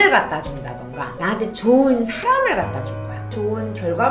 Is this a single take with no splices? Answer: no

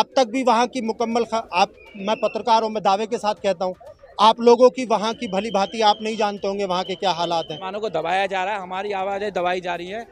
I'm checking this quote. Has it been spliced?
yes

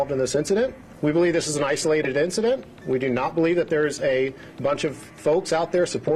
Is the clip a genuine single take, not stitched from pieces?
yes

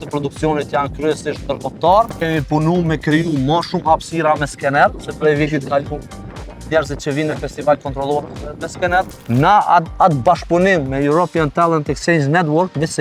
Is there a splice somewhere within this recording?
yes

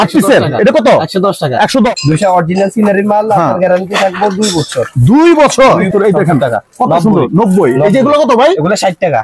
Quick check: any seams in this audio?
yes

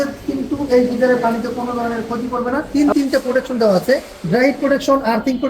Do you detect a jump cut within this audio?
yes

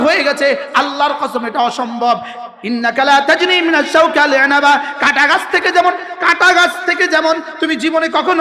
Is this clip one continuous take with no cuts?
yes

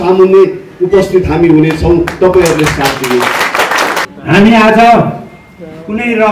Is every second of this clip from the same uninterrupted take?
no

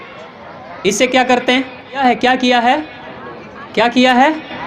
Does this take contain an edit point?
yes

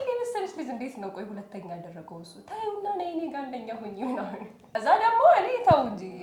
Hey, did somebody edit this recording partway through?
yes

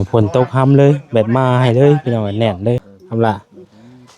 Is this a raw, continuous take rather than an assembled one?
no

